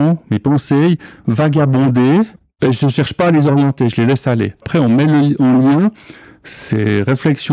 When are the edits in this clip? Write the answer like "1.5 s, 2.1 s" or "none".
2.4 s, 4.6 s